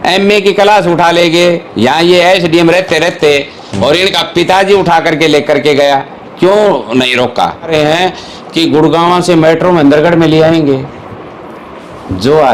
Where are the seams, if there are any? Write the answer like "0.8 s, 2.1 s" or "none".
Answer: 7.7 s